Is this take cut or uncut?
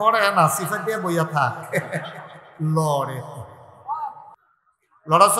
uncut